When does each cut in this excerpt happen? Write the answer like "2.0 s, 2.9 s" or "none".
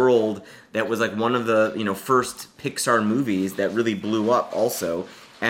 none

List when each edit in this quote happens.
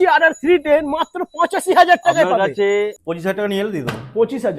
3.0 s

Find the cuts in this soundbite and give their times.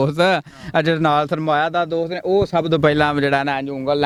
none

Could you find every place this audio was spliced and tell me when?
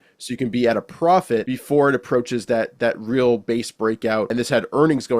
1.5 s, 4.3 s

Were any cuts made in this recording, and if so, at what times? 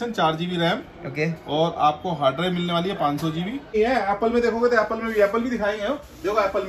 3.7 s

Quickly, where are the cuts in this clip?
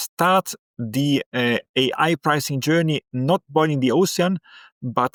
none

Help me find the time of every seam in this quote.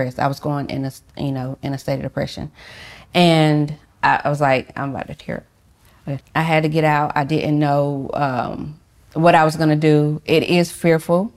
6.2 s

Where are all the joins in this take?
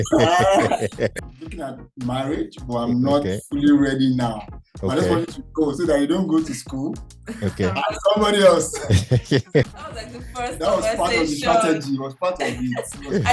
1.1 s, 9.7 s

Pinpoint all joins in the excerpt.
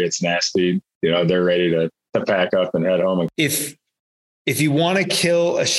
3.3 s

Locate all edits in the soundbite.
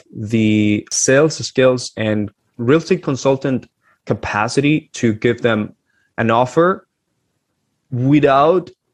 0.9 s, 2.3 s

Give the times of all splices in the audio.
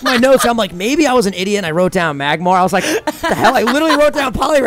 none

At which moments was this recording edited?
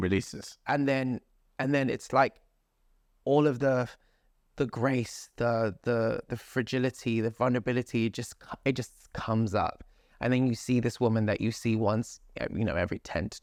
none

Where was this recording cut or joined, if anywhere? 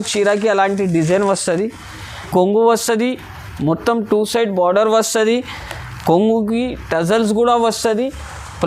2.1 s

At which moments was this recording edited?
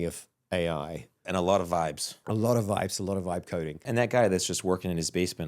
1.2 s, 2.1 s, 3.8 s

